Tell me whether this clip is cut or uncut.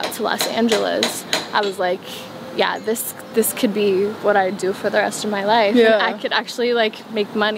uncut